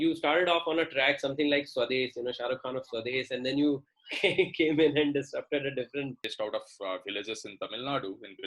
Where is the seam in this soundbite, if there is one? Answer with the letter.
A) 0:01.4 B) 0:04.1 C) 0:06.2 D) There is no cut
C